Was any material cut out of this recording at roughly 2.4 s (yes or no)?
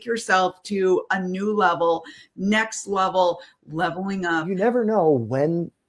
no